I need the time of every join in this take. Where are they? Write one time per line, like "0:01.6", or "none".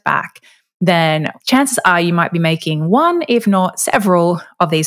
0:01.3